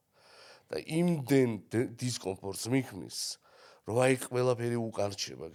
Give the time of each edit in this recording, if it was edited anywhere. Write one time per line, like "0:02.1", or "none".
none